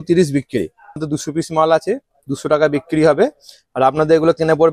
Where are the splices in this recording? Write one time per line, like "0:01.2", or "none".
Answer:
0:01.1

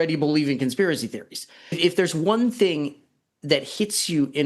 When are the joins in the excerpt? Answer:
0:01.8

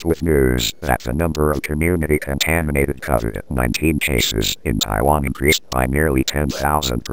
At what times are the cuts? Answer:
none

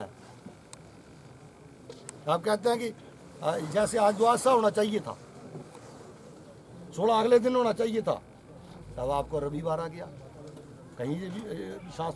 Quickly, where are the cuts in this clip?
none

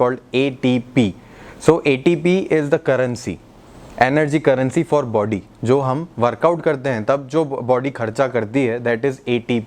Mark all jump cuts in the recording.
none

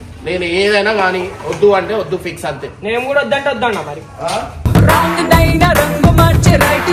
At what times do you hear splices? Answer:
none

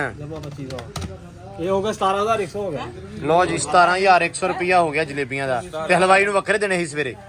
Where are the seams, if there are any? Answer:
none

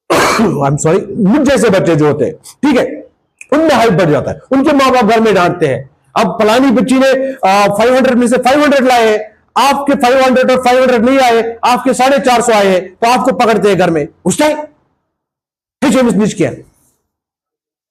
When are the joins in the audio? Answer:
none

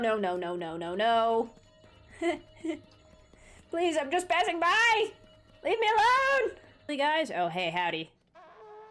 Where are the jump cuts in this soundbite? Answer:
0:06.9

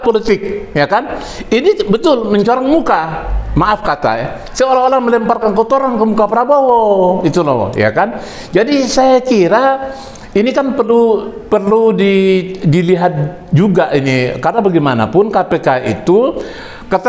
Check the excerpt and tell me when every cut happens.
none

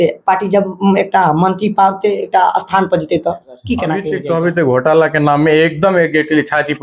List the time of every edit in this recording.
0:04.0

